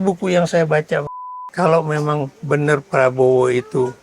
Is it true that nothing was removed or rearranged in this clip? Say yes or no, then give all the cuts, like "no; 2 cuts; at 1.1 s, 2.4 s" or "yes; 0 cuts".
no; 1 cut; at 1.1 s